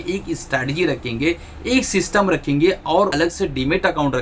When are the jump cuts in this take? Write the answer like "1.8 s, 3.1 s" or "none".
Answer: 3.1 s